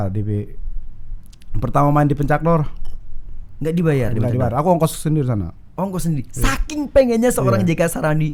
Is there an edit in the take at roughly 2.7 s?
no; 0 cuts

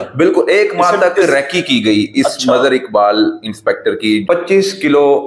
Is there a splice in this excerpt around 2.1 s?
no; 1 cut; at 4.2 s

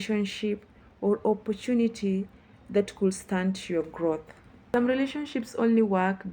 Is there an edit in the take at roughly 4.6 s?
yes; 1 cut; at 4.6 s

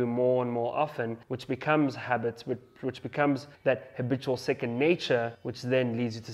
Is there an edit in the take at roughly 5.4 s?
yes; 3 cuts; at 1.3 s, 3.5 s, 5.4 s

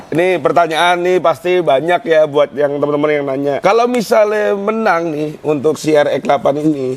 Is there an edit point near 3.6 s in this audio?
yes; 1 cut; at 3.6 s

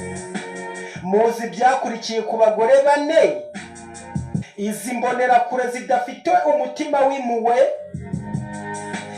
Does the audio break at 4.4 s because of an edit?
yes; 1 cut; at 4.4 s

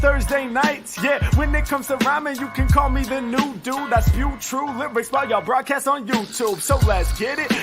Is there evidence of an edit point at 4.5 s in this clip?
no; 1 cut; at 1.3 s

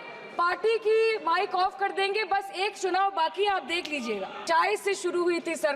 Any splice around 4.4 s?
yes; 1 cut; at 4.4 s

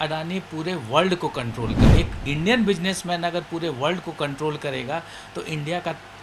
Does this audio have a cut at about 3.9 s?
no; 1 cut; at 1.8 s

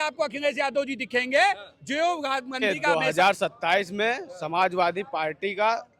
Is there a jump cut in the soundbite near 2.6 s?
yes; 1 cut; at 2.6 s

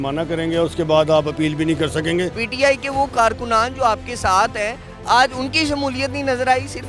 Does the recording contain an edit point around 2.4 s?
yes; 1 cut; at 2.4 s

